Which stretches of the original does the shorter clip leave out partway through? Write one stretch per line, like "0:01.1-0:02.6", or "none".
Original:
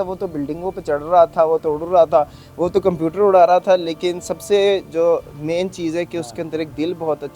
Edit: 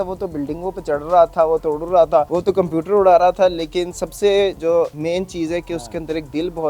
0:02.3-0:02.6
0:05.0-0:05.2